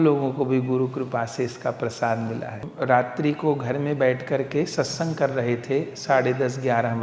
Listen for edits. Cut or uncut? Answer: cut